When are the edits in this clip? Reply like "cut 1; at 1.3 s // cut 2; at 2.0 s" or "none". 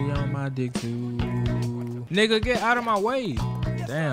cut 1; at 2.0 s